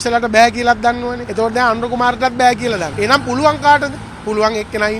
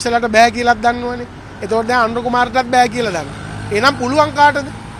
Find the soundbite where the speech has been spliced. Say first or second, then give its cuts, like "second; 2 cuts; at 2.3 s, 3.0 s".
first; 3 cuts; at 1.2 s, 2.9 s, 4.1 s